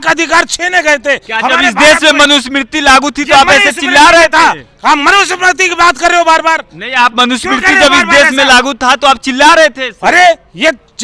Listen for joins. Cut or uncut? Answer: uncut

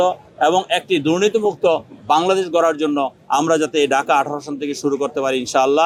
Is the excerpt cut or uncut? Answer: uncut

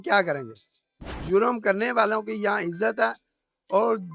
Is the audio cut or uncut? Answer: cut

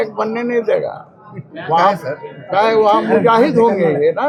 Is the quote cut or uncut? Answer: uncut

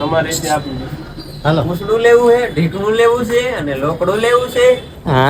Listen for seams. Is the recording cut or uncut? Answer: uncut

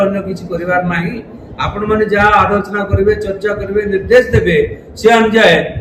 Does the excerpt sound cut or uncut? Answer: uncut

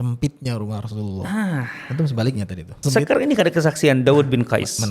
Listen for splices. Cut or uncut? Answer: cut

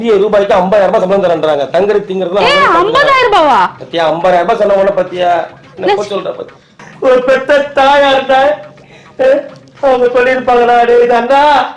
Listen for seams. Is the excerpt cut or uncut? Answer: cut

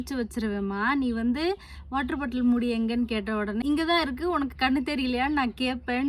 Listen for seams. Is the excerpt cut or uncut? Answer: uncut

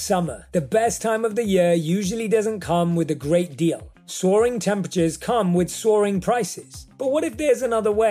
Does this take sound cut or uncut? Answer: uncut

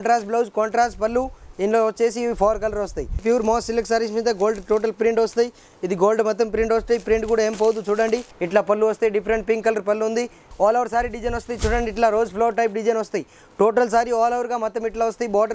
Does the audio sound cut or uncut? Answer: cut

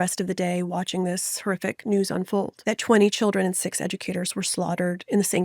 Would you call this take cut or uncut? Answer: cut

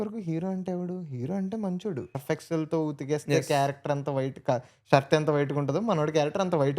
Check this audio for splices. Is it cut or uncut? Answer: cut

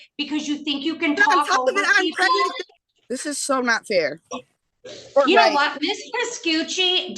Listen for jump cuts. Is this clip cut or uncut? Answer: cut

